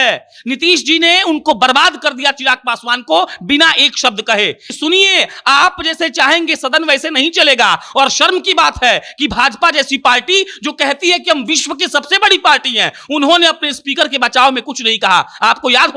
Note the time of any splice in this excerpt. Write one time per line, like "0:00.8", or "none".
0:04.6

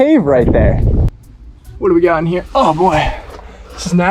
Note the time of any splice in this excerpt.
0:01.0

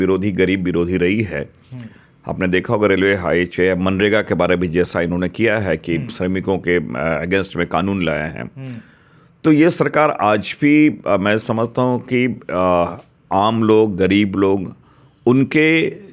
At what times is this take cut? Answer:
none

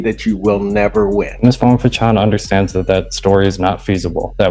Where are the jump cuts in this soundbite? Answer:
0:01.3

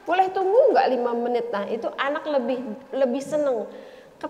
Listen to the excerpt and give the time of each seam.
none

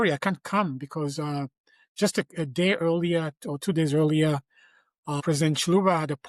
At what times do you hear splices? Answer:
0:05.2

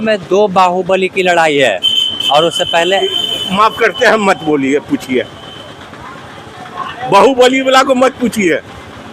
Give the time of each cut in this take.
none

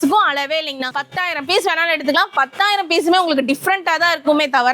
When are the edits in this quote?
0:01.0

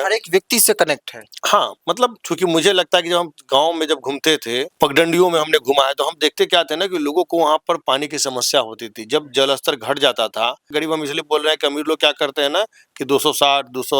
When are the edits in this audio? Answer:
0:02.2
0:04.7
0:10.7

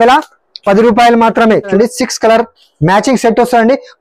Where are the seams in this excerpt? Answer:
0:01.7

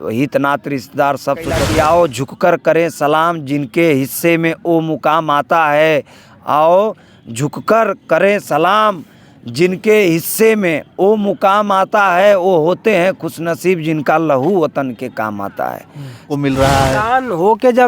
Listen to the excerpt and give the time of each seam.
0:01.6
0:16.3

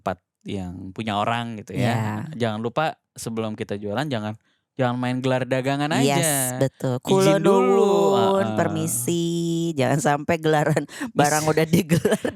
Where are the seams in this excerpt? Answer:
none

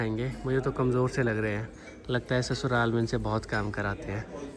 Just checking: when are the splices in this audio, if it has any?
none

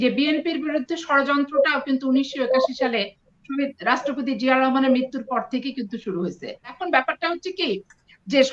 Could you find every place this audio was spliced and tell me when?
0:06.8

